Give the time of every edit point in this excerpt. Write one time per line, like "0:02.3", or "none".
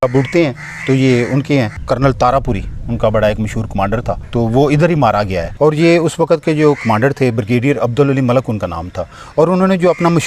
0:01.8
0:04.2
0:05.5

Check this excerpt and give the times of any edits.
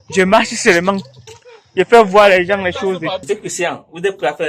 0:03.2

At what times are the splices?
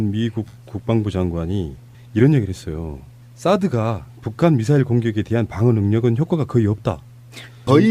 0:06.3

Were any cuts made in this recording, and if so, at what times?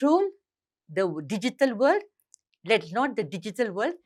none

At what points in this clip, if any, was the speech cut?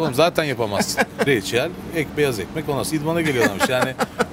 0:01.3

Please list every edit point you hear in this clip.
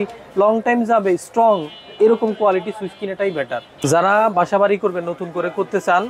0:03.7

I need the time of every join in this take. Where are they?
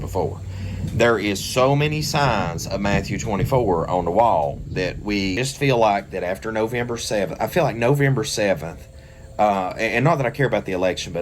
0:05.4

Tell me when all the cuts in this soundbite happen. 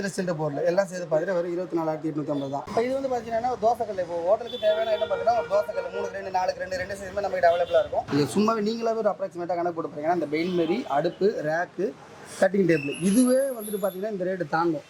0:02.6
0:08.1

